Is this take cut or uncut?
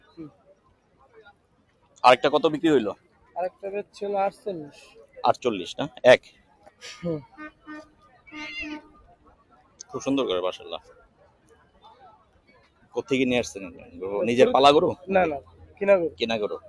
uncut